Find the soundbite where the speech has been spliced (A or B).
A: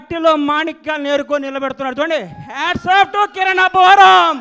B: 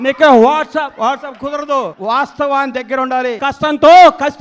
B